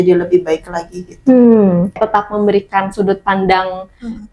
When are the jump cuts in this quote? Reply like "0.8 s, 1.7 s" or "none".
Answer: 2.0 s